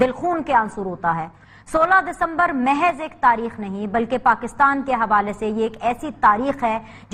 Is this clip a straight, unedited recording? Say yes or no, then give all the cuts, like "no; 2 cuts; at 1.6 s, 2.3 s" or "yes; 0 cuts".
no; 1 cut; at 1.4 s